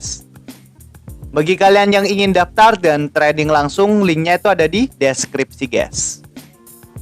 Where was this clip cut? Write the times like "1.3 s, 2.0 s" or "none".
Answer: 6.1 s